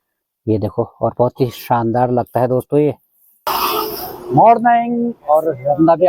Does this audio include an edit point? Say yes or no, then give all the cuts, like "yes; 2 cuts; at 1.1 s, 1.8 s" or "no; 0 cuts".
yes; 1 cut; at 3.5 s